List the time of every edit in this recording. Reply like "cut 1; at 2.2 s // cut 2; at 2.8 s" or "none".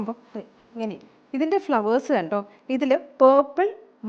cut 1; at 1.1 s